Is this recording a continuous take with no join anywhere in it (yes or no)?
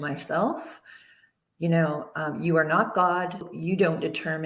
no